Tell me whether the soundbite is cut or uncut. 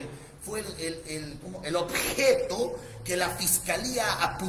uncut